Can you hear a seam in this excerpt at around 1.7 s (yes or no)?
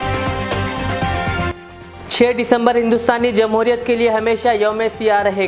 yes